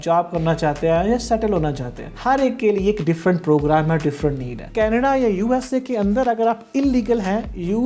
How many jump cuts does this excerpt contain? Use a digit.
2